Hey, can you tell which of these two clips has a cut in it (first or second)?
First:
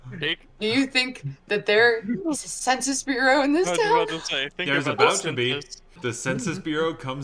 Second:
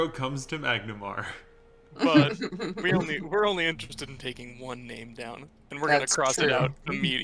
first